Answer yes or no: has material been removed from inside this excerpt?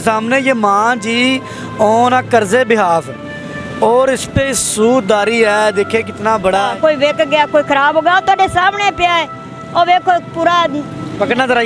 yes